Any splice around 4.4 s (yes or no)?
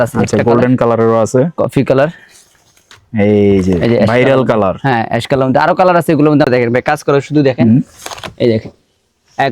no